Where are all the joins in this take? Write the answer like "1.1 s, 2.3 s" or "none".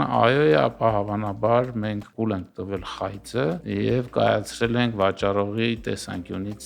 3.6 s

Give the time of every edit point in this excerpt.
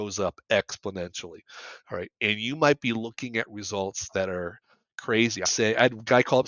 5.4 s

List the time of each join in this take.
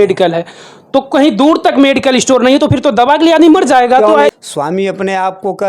4.3 s

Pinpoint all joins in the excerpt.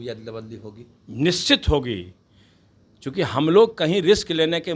none

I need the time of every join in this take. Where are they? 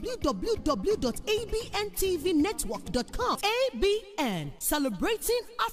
none

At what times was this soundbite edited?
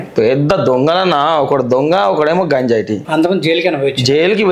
3.0 s

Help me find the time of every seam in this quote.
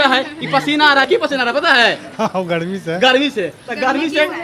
none

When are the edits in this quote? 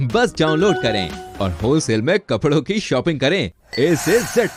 none

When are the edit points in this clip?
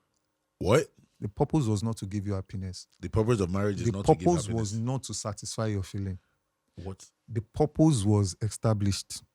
none

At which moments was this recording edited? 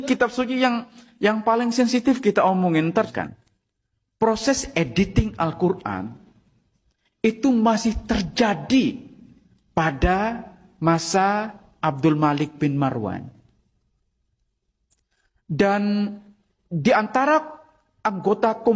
3.1 s

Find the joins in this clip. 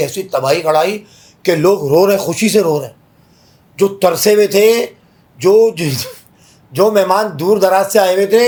none

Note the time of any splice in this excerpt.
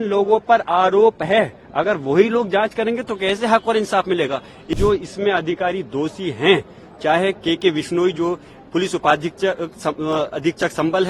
4.7 s

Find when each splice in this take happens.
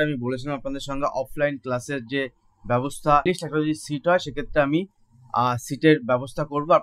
3.2 s

